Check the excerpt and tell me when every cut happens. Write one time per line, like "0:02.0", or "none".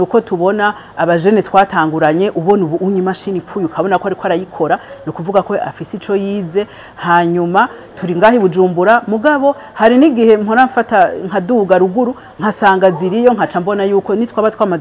none